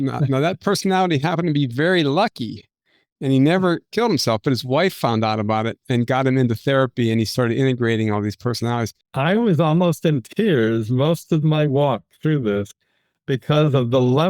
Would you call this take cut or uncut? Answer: cut